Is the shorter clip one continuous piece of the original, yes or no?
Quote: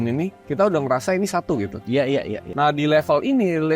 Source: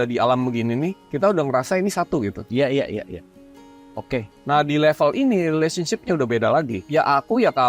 no